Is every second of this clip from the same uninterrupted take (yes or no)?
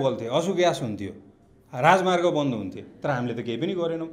yes